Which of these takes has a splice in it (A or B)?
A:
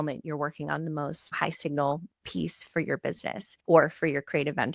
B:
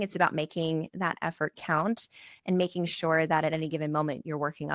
A